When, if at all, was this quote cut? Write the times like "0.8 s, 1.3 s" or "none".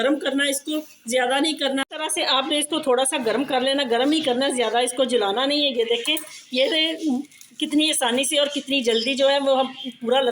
1.8 s